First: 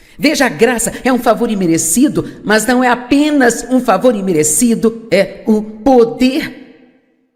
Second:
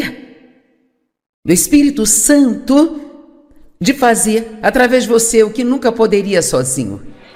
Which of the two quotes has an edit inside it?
first; 1 cut; at 3.0 s

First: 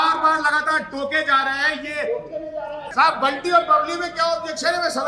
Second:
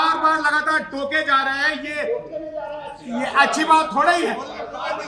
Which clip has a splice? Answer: first; 1 cut; at 2.8 s

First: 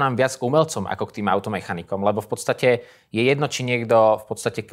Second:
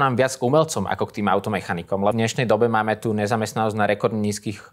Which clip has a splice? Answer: second; 1 cut; at 2.1 s

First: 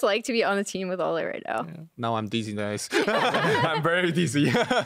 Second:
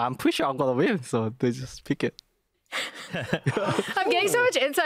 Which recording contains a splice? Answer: second; 1 cut; at 3.2 s

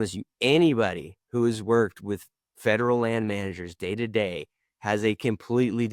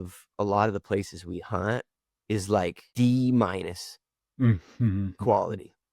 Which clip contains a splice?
second; 1 cut; at 2.8 s

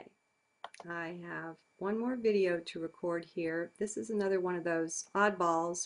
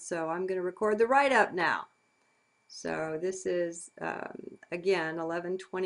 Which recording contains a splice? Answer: second; 1 cut; at 2.0 s

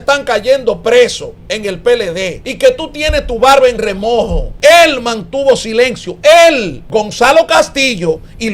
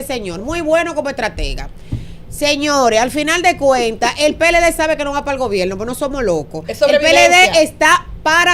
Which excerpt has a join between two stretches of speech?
first; 3 cuts; at 2.4 s, 4.4 s, 6.7 s

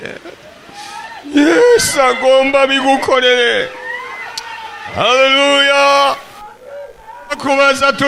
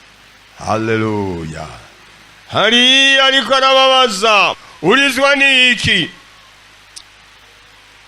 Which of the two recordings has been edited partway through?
second; 1 cut; at 4.6 s

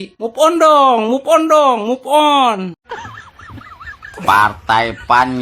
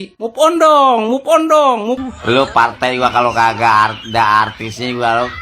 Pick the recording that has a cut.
second; 1 cut; at 2.0 s

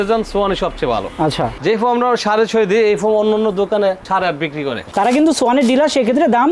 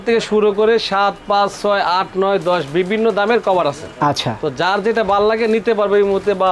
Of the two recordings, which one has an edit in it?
first; 2 cuts; at 1.6 s, 4.9 s

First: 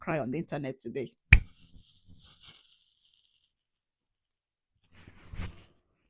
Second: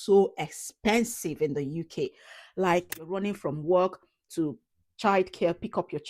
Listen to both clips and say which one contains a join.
second; 1 cut; at 3.1 s

